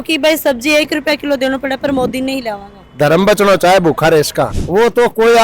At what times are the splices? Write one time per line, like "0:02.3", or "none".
0:00.9
0:04.6